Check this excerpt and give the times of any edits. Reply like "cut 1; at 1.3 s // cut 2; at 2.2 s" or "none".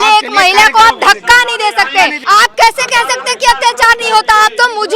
cut 1; at 2.2 s